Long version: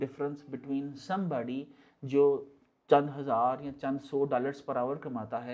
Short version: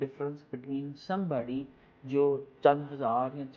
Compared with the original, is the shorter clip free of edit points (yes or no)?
no